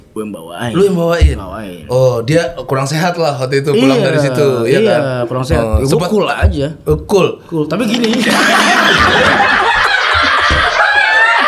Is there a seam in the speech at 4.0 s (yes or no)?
no